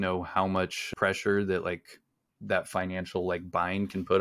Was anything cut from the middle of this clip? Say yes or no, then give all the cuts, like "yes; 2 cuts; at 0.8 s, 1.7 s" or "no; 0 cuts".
yes; 1 cut; at 0.9 s